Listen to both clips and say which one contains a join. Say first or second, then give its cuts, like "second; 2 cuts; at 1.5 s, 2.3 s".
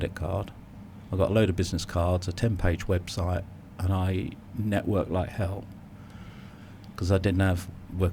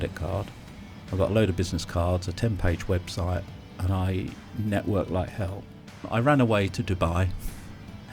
second; 1 cut; at 6.0 s